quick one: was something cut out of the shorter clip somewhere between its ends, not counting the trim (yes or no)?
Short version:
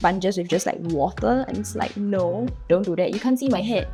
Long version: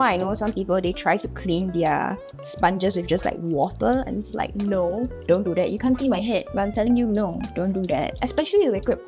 no